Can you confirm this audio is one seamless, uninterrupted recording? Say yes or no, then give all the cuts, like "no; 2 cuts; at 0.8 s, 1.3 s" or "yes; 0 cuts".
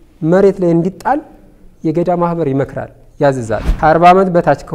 no; 1 cut; at 3.7 s